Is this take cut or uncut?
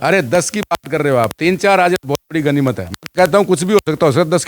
uncut